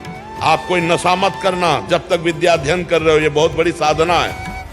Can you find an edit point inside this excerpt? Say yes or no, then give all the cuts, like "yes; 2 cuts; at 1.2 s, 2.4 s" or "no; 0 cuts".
no; 0 cuts